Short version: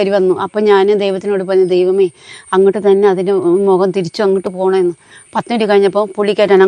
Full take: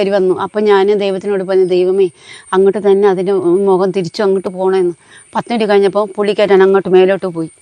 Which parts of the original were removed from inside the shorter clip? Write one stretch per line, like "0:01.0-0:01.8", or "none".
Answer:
none